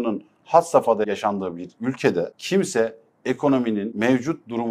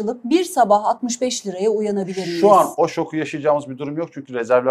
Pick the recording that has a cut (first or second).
first